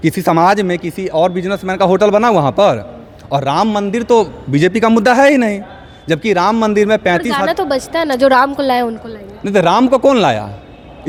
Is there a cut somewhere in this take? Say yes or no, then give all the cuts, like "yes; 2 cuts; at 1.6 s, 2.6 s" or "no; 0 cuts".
no; 0 cuts